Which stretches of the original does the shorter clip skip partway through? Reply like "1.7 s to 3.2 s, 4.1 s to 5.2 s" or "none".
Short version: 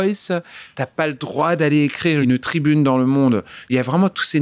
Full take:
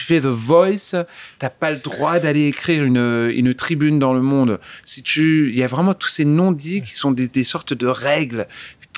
2.9 s to 3.4 s, 4.8 s to 5.5 s